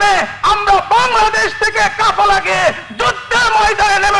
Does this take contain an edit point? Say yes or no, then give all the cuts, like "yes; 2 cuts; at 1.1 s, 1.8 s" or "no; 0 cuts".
no; 0 cuts